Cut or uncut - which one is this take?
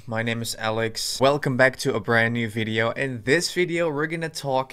cut